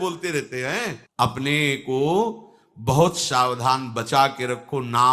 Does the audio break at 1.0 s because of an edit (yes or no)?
yes